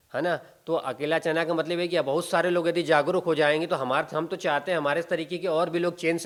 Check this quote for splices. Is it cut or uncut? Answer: uncut